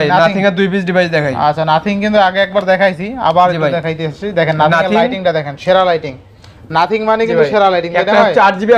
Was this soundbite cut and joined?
no; 0 cuts

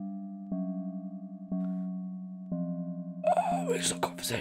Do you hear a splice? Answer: no; 0 cuts

